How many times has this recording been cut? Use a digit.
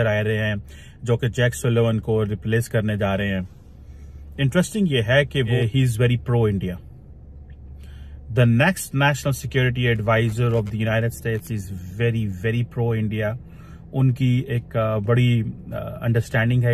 1